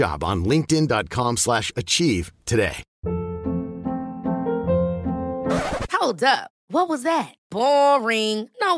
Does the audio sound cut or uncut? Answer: cut